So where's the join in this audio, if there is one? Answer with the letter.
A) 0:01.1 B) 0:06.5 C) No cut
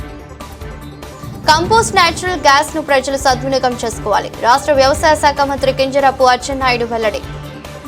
C